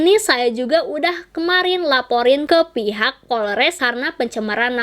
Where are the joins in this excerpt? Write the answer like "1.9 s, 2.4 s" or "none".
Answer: 3.8 s